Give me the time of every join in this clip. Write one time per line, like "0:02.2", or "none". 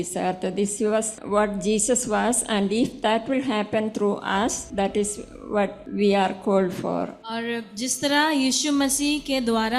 0:01.2
0:04.6
0:05.8
0:07.2